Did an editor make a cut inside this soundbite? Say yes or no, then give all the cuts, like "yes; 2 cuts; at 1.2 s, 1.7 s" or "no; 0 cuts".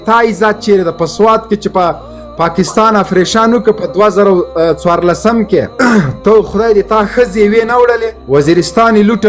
no; 0 cuts